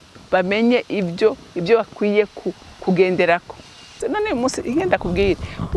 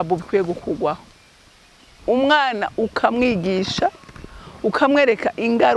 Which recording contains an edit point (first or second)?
first